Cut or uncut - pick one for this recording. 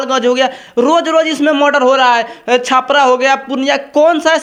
uncut